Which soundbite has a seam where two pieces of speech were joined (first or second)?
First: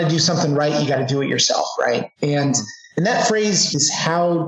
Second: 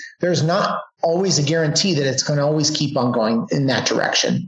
second